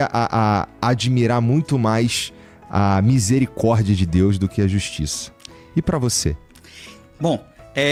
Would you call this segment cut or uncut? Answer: uncut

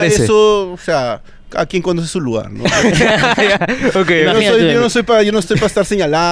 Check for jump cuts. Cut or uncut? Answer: uncut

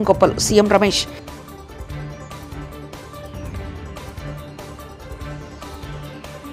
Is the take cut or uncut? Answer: uncut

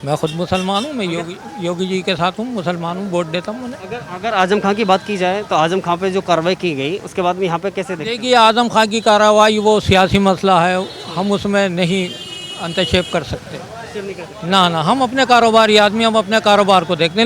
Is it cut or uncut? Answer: uncut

